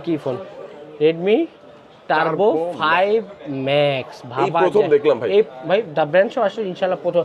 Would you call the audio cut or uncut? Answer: uncut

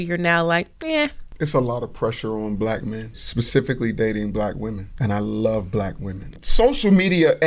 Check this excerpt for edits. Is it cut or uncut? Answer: cut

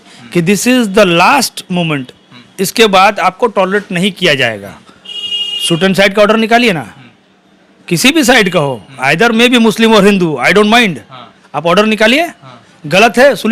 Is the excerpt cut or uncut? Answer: uncut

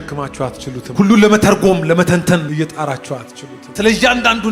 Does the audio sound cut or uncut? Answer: cut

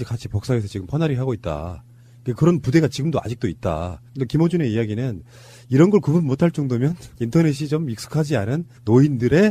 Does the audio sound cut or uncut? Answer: uncut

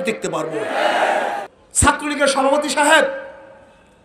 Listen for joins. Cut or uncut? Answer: cut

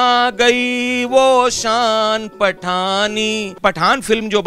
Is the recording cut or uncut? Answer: cut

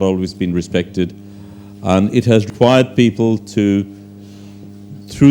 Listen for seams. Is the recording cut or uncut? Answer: cut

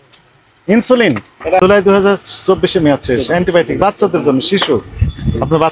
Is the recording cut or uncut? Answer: cut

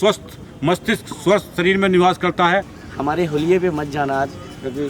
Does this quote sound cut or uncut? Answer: cut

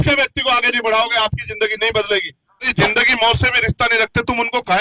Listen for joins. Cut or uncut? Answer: cut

